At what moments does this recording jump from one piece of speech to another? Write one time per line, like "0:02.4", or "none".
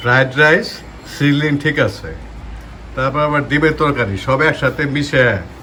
none